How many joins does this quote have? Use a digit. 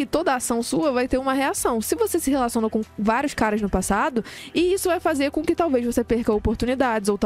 1